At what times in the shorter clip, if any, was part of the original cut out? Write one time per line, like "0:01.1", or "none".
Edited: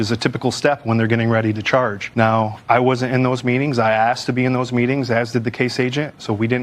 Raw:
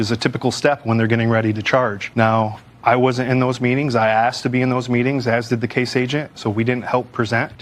0:02.6